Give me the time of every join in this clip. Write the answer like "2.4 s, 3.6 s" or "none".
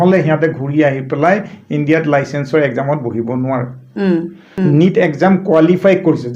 4.4 s